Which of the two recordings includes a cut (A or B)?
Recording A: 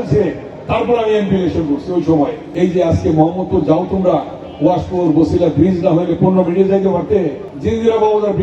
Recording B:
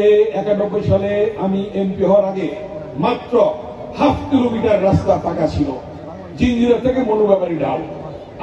A